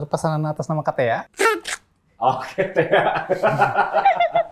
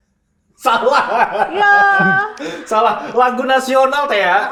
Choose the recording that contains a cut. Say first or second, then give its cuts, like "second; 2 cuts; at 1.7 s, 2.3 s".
first; 1 cut; at 1.3 s